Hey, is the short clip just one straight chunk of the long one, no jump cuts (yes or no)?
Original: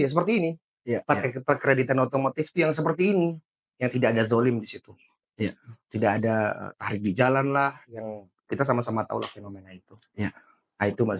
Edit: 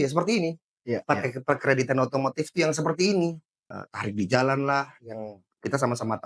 no